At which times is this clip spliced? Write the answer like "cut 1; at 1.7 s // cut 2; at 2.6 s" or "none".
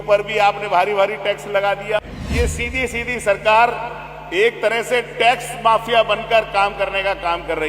cut 1; at 2.2 s